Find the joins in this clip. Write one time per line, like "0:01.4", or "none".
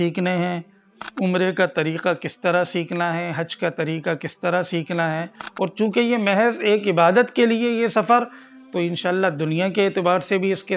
0:05.4